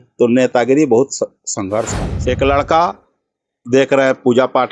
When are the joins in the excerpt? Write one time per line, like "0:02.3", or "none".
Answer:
0:02.0